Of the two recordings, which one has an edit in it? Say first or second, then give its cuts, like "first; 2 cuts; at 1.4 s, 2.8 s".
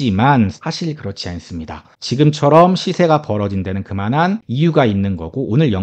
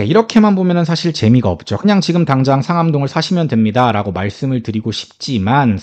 first; 2 cuts; at 1.9 s, 4.5 s